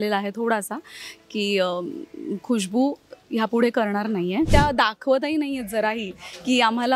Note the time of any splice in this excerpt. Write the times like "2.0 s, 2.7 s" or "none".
4.5 s

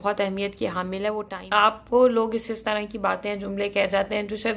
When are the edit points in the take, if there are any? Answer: 1.8 s

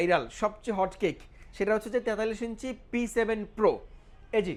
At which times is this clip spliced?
none

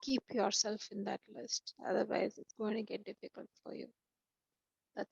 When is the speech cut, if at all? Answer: none

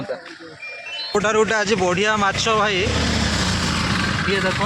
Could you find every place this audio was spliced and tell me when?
1.1 s

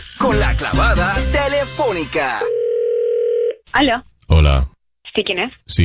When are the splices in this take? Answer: 3.6 s

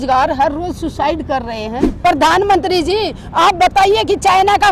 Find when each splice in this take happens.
1.9 s

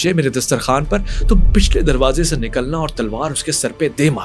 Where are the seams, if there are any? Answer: none

